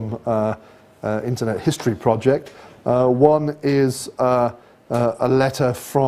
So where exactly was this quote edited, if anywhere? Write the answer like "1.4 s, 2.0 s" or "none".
4.1 s